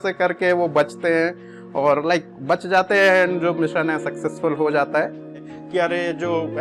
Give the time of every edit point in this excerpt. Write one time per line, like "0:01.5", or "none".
0:05.5